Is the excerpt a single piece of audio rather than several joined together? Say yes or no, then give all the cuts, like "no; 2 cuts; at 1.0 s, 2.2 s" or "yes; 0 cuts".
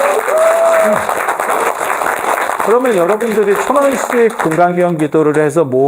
yes; 0 cuts